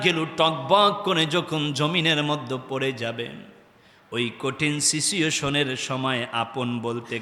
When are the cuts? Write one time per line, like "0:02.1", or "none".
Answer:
none